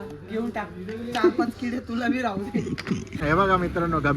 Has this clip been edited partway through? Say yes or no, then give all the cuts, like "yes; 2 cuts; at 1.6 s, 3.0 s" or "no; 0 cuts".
yes; 1 cut; at 3.2 s